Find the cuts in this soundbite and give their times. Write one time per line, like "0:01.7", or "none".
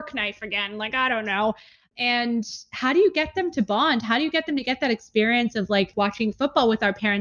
0:01.9
0:05.9